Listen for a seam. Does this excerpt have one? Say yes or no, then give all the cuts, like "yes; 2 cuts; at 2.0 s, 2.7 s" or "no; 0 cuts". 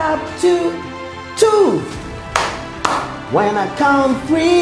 no; 0 cuts